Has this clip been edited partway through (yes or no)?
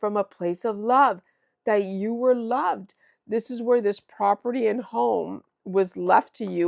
no